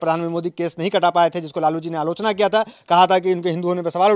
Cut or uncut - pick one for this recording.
uncut